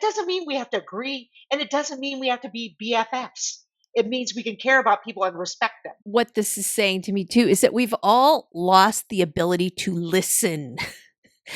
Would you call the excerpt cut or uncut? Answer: cut